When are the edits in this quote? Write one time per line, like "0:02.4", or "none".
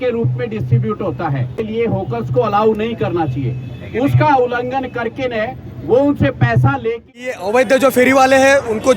0:01.6
0:07.4